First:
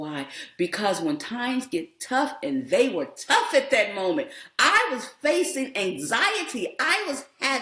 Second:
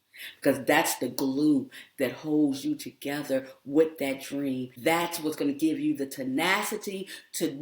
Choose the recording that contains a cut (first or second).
second